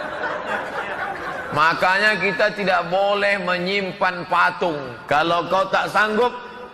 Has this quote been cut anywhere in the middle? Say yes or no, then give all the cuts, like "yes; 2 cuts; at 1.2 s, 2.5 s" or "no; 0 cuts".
yes; 1 cut; at 4.9 s